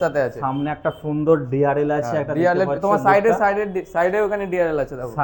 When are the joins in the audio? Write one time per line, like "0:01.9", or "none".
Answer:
none